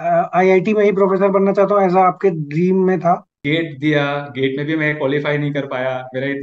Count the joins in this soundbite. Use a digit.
1